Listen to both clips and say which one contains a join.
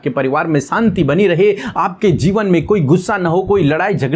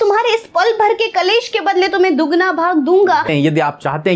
second; 1 cut; at 3.3 s

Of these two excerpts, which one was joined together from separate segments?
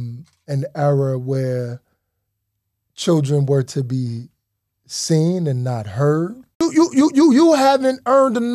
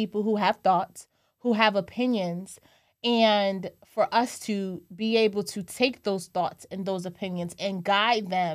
first; 1 cut; at 6.6 s

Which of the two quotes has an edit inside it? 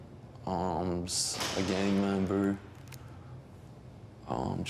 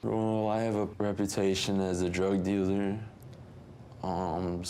second; 1 cut; at 0.9 s

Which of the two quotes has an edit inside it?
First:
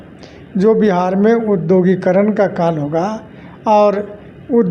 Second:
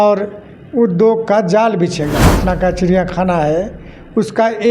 second; 1 cut; at 2.3 s

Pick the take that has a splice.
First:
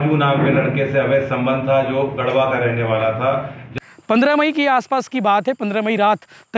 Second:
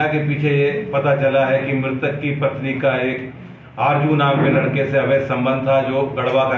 first; 1 cut; at 3.6 s

